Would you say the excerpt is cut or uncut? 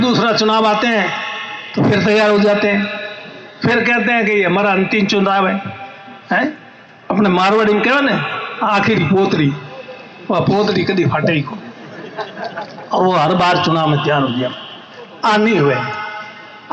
uncut